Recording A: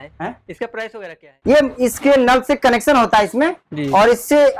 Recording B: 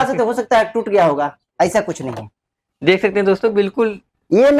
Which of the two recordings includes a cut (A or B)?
A